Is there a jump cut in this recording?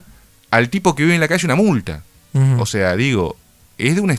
no; 0 cuts

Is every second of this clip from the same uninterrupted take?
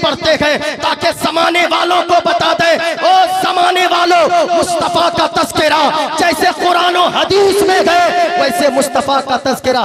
yes; 0 cuts

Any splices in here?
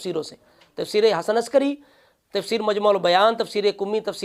no; 0 cuts

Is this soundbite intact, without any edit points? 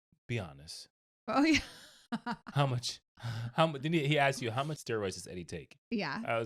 no; 1 cut; at 4.8 s

